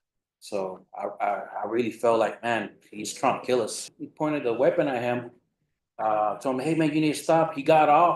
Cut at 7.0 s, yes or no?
no